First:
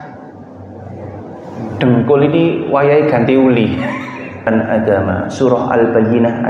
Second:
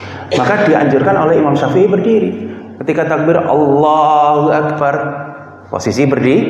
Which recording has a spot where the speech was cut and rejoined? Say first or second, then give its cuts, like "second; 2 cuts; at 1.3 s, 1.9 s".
first; 1 cut; at 4.5 s